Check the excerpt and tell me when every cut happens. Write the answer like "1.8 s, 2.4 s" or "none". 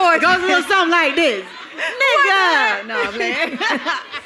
none